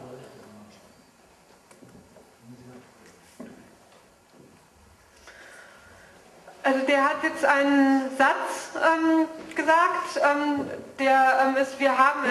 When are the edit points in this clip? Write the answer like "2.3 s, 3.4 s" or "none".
none